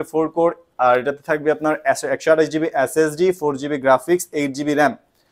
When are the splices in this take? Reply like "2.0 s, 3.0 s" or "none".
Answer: none